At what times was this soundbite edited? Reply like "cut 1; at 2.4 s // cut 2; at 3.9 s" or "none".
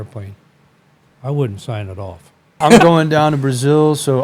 cut 1; at 2.6 s